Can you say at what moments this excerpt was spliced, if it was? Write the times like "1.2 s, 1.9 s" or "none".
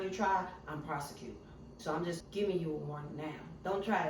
2.2 s